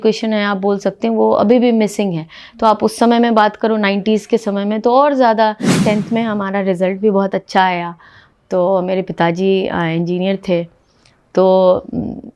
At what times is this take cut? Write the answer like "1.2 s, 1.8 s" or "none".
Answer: 5.8 s